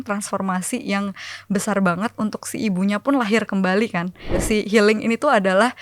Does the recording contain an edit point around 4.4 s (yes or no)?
yes